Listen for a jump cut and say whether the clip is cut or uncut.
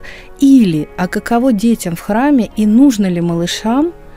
uncut